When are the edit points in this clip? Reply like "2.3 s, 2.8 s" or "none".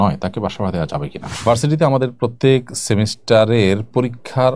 1.3 s, 2.3 s